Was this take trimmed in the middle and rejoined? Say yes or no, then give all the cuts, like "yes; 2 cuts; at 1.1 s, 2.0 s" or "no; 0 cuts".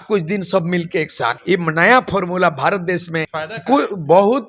yes; 2 cuts; at 1.4 s, 3.3 s